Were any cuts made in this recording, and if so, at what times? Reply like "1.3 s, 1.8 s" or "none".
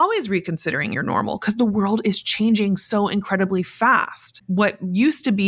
4.4 s